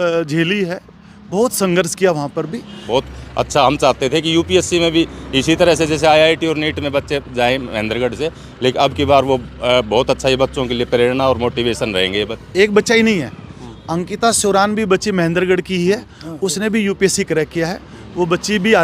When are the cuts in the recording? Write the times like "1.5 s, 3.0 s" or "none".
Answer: 2.8 s, 12.4 s